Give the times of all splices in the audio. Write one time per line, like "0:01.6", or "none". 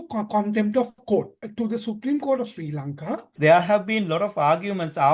0:01.4
0:03.3